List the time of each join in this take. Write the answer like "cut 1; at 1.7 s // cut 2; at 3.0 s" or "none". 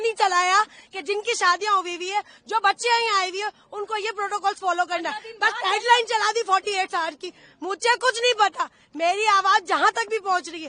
none